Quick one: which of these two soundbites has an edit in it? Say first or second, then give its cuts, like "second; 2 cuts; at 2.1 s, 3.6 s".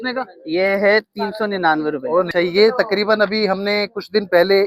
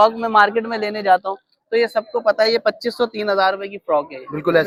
first; 1 cut; at 2.3 s